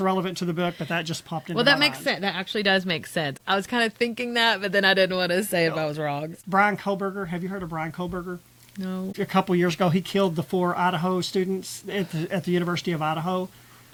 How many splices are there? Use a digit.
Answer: 0